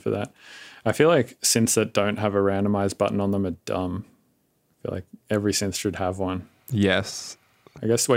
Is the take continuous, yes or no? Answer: yes